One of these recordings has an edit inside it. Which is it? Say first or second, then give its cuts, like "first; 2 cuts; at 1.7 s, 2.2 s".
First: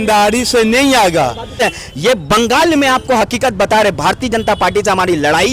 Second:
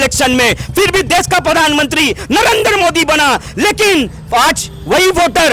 first; 1 cut; at 1.6 s